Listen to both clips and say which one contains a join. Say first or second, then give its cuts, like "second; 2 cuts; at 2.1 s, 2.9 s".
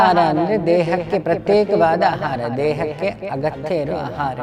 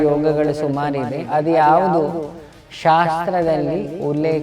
second; 1 cut; at 1.2 s